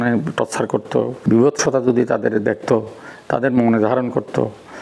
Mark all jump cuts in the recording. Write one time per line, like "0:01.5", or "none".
0:01.2